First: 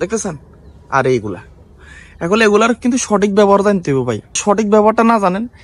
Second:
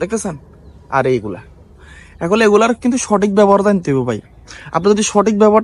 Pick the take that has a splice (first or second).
first